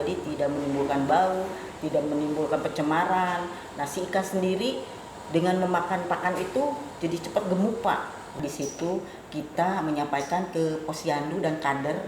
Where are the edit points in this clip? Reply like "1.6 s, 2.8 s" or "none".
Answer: 8.4 s